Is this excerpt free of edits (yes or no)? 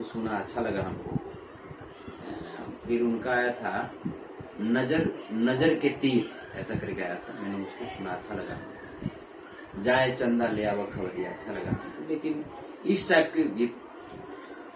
yes